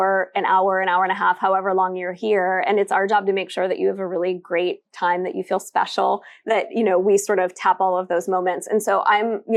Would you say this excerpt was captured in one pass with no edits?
yes; 0 cuts

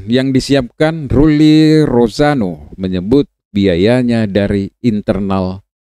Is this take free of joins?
yes; 0 cuts

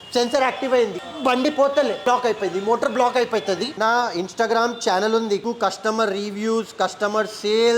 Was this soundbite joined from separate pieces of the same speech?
yes; 4 cuts; at 1.0 s, 2.0 s, 3.7 s, 5.4 s

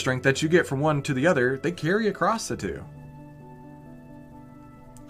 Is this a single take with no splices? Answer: yes; 0 cuts

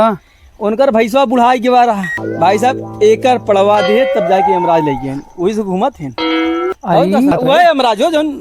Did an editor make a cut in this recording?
yes; 2 cuts; at 2.1 s, 7.3 s

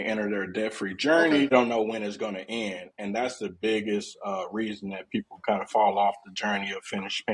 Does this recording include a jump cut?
yes; 1 cut; at 1.5 s

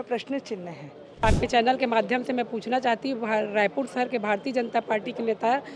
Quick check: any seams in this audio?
yes; 1 cut; at 1.2 s

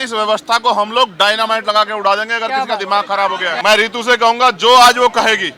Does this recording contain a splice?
yes; 1 cut; at 3.6 s

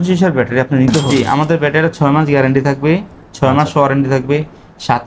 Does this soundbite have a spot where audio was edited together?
yes; 1 cut; at 1.1 s

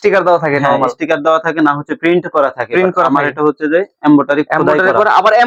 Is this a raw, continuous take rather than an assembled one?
yes; 0 cuts

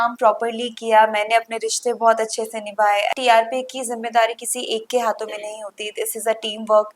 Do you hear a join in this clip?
yes; 1 cut; at 3.1 s

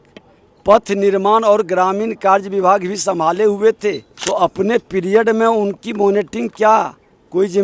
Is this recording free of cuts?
no; 1 cut; at 4.1 s

